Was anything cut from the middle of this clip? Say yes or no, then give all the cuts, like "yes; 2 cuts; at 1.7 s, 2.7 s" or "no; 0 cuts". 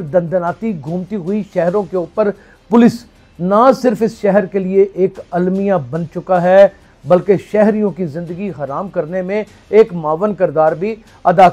no; 0 cuts